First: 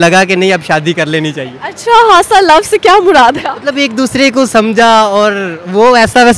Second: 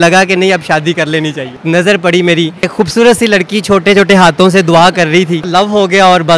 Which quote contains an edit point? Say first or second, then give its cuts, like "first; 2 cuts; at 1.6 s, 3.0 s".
second; 3 cuts; at 1.6 s, 2.7 s, 5.5 s